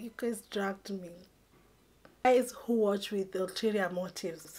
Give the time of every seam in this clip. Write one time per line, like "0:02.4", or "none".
0:02.2